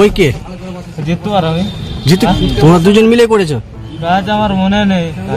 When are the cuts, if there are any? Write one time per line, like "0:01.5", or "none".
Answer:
0:02.3